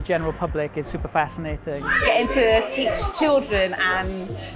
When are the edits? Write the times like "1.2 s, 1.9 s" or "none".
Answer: 1.9 s